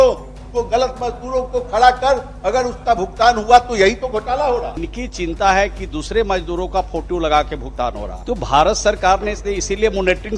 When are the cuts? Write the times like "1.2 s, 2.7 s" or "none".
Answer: 4.9 s, 8.1 s